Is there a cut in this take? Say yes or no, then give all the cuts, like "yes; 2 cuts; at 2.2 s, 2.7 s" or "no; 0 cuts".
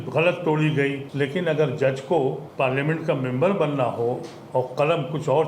yes; 2 cuts; at 1.0 s, 2.4 s